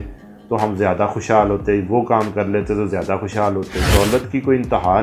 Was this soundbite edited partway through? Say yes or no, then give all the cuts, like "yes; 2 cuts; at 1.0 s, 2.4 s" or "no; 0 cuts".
yes; 1 cut; at 3.9 s